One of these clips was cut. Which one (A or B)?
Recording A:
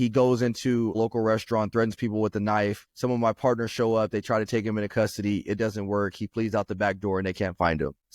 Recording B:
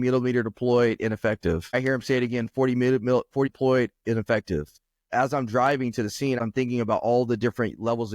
B